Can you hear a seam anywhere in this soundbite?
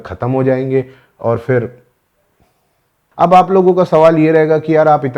yes; 1 cut; at 3.0 s

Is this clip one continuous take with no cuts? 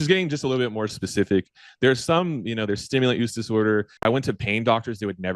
no; 1 cut; at 4.0 s

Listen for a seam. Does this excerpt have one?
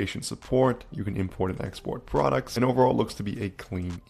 yes; 1 cut; at 2.5 s

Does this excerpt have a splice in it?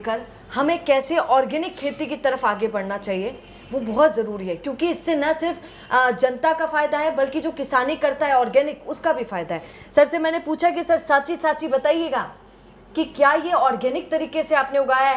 no; 0 cuts

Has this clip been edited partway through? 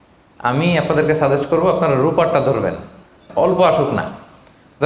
yes; 1 cut; at 3.3 s

